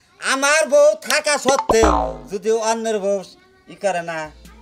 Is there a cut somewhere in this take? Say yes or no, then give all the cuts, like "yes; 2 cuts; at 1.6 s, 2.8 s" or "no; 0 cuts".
no; 0 cuts